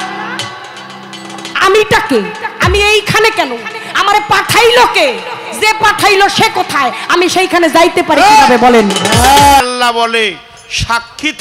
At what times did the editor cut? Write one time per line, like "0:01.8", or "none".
0:09.6

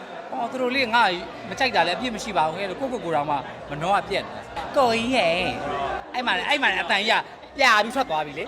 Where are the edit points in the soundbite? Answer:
none

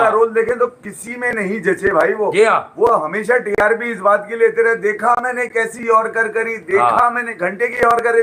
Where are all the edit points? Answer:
none

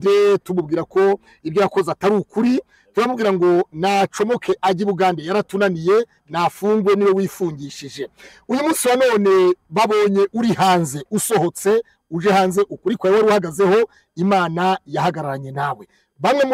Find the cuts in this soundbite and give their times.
none

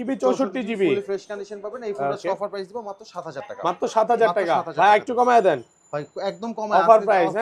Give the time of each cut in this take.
none

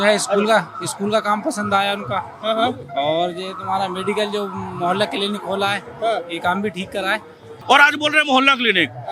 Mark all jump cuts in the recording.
0:07.6

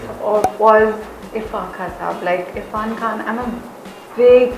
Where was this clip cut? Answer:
none

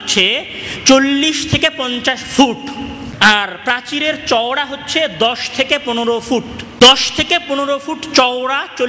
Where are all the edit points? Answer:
0:03.0
0:06.6

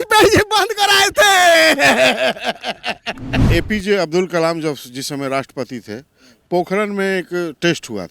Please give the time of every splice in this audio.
0:03.4

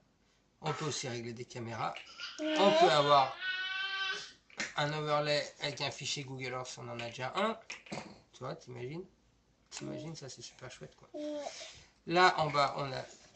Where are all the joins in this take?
0:04.2

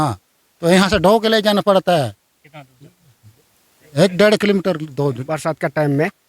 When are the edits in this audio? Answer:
0:05.3

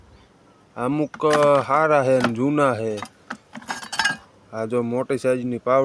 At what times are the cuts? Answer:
none

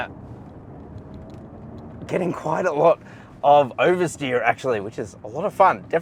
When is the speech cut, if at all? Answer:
none

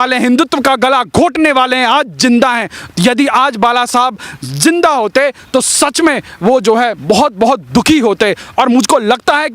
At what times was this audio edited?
none

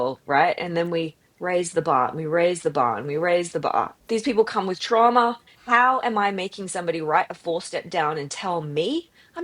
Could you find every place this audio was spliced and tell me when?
0:03.9
0:05.5

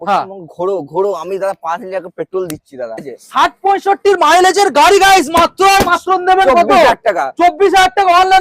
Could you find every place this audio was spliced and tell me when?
0:03.1

